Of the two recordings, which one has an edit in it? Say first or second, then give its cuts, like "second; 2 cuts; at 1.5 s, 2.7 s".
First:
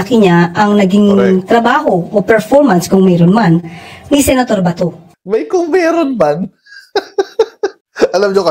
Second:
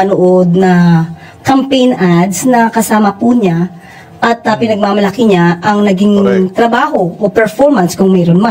first; 1 cut; at 5.1 s